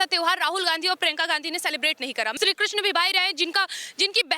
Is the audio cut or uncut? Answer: cut